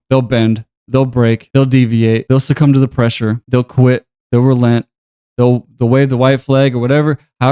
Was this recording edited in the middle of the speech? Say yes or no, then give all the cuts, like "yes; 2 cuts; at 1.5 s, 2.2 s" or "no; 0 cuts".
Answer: yes; 3 cuts; at 1.4 s, 2.2 s, 3.4 s